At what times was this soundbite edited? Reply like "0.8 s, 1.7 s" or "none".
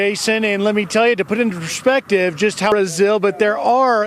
2.7 s